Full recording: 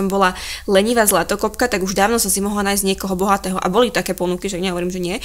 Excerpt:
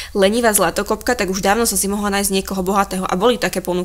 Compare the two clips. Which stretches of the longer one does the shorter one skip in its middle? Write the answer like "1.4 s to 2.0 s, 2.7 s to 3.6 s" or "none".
none